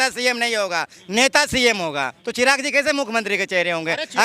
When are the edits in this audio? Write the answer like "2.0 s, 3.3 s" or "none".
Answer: 2.2 s